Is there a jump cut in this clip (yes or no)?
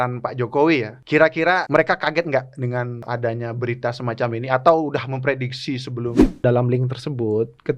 yes